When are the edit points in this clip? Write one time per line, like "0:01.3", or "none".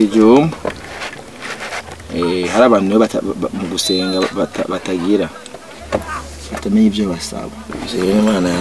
0:07.7